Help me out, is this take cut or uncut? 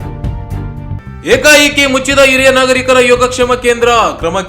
cut